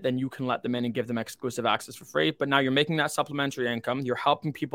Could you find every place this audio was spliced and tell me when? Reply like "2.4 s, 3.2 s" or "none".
none